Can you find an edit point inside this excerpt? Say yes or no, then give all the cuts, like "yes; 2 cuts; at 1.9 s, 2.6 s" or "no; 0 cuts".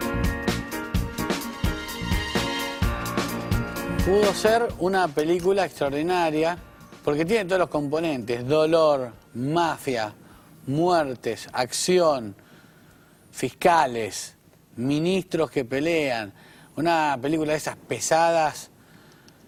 no; 0 cuts